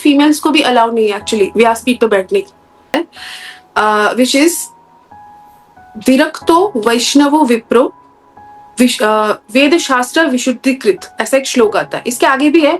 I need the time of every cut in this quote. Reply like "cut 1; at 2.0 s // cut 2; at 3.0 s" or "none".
cut 1; at 2.8 s